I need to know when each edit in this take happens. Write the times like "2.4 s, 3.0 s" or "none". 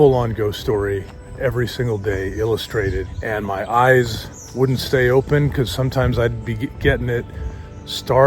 3.1 s